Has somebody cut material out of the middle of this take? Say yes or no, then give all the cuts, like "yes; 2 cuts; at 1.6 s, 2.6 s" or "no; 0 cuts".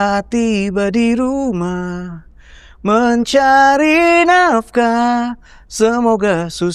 no; 0 cuts